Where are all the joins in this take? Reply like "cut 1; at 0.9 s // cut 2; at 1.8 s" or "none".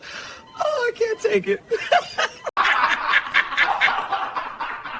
cut 1; at 2.5 s